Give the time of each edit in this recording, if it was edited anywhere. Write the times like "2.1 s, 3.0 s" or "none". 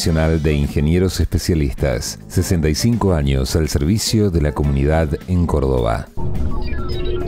6.1 s